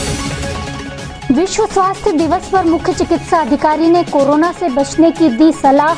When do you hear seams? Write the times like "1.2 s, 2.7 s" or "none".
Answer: 1.2 s